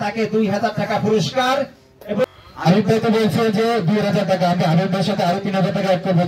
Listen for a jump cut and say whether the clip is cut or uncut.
cut